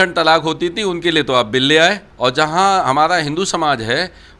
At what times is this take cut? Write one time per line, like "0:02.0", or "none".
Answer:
0:02.1